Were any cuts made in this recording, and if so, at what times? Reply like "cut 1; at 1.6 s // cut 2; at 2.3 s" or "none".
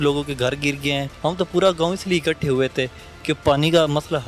cut 1; at 1.1 s